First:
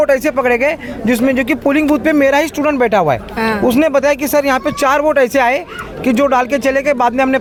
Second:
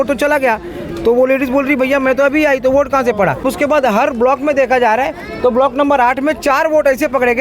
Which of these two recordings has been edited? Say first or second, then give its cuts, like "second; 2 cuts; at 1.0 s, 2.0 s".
second; 1 cut; at 3.5 s